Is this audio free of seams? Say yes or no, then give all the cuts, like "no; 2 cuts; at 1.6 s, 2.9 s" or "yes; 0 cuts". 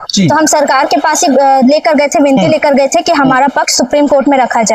yes; 0 cuts